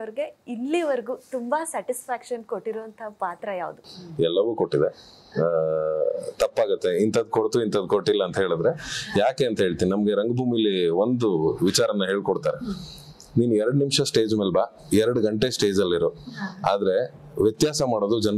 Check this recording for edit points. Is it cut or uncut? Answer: uncut